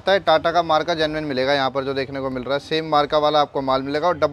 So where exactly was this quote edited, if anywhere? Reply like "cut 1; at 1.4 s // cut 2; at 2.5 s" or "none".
none

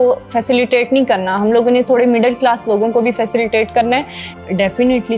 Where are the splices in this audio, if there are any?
cut 1; at 4.2 s

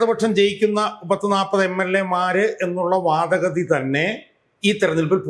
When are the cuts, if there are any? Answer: none

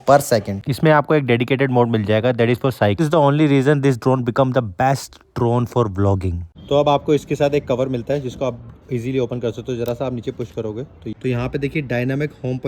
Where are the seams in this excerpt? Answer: cut 1; at 3.0 s // cut 2; at 11.0 s

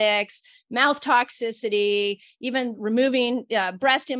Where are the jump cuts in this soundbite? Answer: none

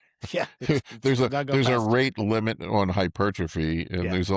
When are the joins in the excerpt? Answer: none

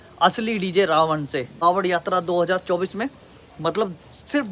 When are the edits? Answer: cut 1; at 1.5 s

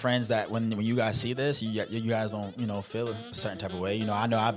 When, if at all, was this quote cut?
none

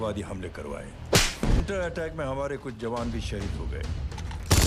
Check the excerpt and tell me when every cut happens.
cut 1; at 1.6 s

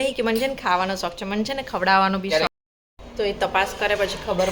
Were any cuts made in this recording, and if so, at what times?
cut 1; at 2.5 s

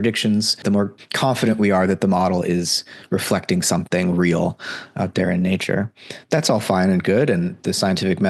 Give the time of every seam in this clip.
cut 1; at 0.9 s

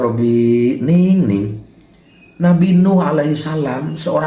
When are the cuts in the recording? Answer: none

